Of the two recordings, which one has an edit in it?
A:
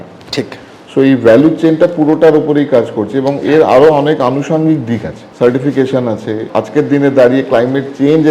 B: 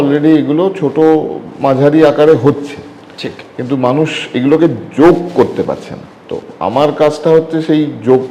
A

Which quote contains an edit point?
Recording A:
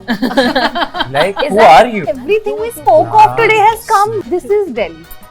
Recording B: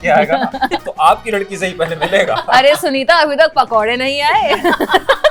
A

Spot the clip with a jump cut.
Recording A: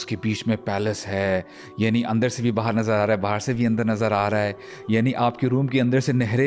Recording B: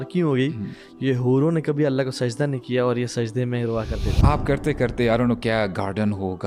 B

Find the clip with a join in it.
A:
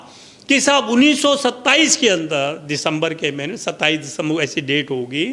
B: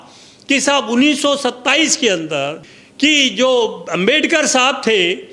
B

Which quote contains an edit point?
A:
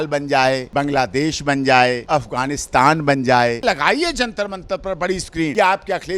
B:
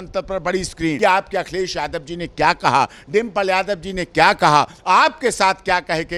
A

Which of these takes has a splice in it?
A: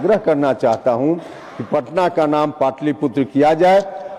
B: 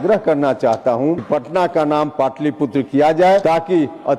B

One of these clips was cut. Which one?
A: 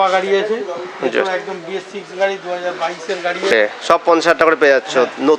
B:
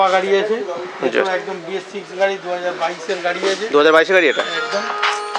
A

